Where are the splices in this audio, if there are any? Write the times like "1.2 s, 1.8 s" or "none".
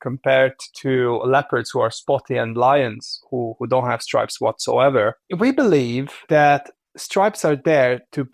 5.2 s, 6.1 s